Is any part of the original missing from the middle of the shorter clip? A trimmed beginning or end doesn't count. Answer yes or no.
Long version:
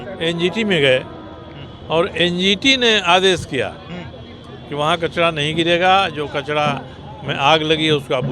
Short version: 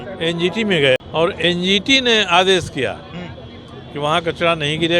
yes